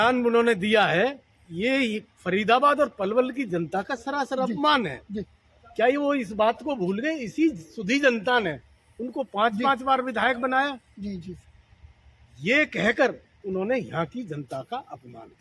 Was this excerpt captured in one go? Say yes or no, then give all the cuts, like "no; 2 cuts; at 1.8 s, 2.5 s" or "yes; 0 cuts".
yes; 0 cuts